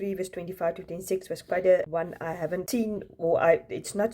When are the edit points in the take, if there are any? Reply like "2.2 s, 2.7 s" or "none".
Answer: 2.5 s